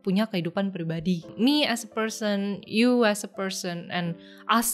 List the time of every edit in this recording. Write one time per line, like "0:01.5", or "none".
0:01.3